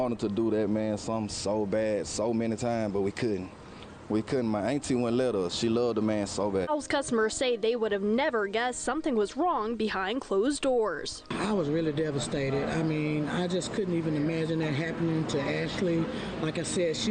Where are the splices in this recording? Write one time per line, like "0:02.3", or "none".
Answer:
none